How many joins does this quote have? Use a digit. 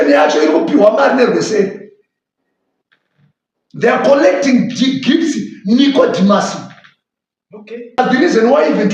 1